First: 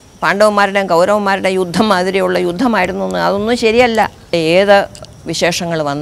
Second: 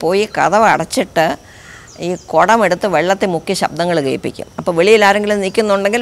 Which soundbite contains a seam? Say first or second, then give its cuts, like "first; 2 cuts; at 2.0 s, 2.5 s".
first; 1 cut; at 4.3 s